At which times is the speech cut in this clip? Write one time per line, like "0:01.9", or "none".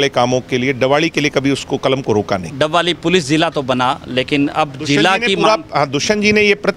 0:02.5